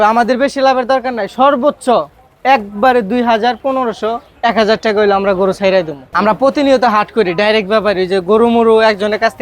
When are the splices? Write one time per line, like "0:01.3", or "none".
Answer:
0:06.0